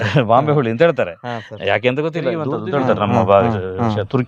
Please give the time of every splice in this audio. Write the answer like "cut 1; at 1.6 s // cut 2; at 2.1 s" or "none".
cut 1; at 2.5 s